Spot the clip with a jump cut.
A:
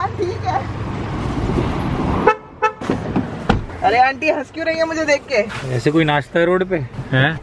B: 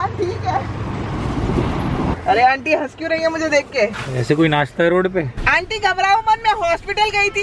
B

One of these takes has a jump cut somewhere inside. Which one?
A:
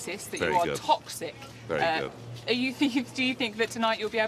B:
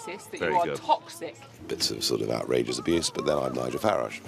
B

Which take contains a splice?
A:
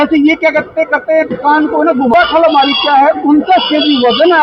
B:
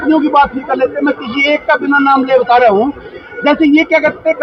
A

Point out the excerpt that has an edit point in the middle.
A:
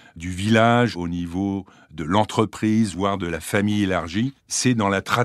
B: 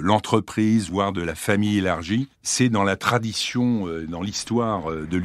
A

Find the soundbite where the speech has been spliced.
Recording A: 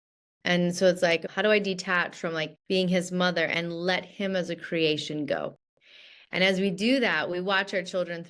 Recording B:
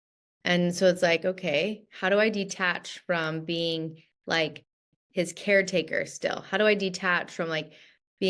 A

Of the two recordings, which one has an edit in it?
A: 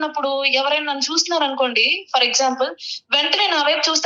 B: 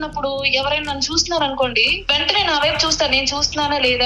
B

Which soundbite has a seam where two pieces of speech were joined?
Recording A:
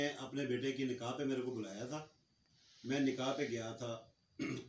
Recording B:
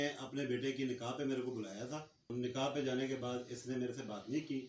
B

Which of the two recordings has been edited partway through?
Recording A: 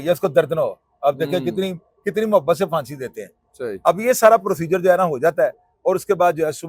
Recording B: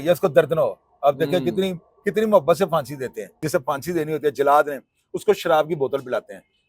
B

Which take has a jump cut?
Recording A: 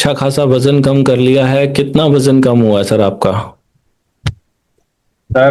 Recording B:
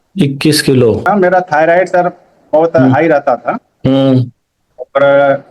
B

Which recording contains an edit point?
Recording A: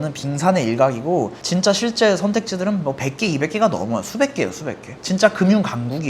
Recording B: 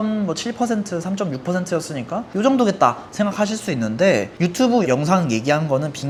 A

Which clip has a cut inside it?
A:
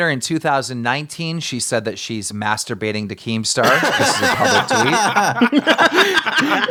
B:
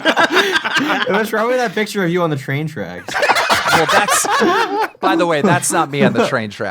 B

